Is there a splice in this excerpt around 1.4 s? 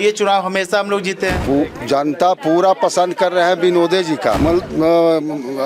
yes; 2 cuts; at 1.4 s, 4.4 s

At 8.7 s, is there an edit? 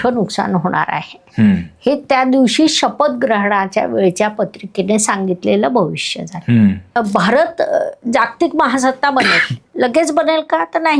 no; 1 cut; at 7.0 s

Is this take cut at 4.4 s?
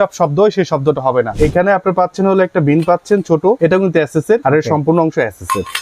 yes; 3 cuts; at 1.3 s, 3.6 s, 4.4 s

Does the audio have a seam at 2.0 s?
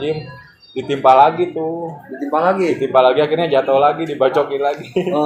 no; 0 cuts

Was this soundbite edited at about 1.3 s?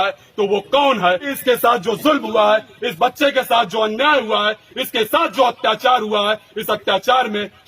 yes; 1 cut; at 1.3 s

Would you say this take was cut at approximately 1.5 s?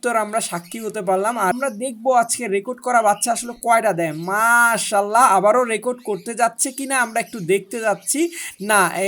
yes; 1 cut; at 1.5 s

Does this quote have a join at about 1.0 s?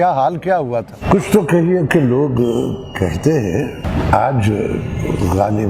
yes; 2 cuts; at 1.0 s, 3.8 s

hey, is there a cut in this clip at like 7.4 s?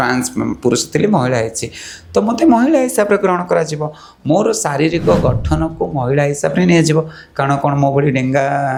no; 0 cuts

